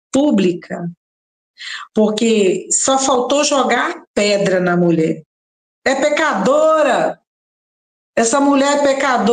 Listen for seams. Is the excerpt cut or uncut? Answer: uncut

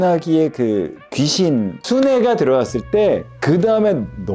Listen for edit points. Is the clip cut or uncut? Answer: uncut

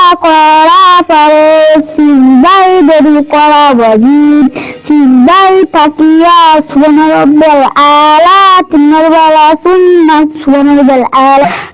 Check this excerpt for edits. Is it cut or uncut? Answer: uncut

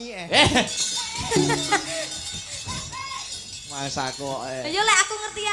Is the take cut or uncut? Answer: uncut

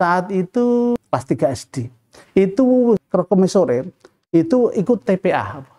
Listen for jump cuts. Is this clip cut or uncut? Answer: cut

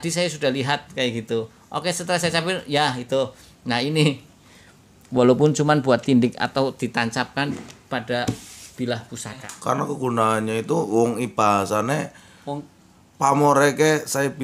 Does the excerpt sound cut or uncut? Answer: cut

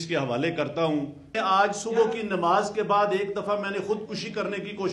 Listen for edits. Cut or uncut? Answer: cut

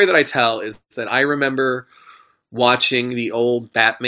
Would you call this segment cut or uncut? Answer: uncut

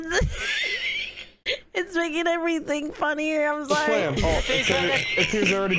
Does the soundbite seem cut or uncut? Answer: cut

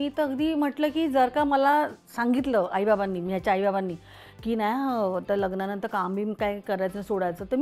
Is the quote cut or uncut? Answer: uncut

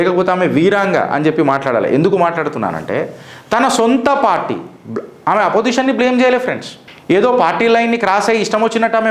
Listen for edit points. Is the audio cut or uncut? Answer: uncut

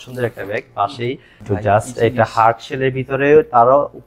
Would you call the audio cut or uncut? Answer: cut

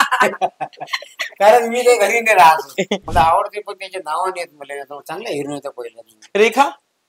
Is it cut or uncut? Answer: cut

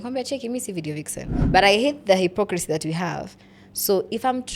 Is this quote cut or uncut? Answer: cut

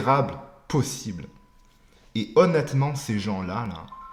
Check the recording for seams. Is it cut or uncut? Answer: uncut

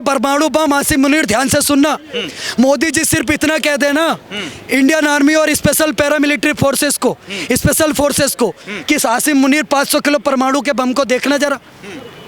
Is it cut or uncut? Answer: uncut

